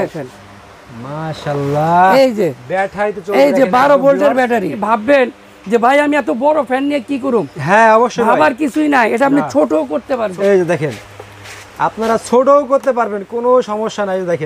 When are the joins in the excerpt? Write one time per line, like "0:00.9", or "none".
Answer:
0:04.8
0:10.3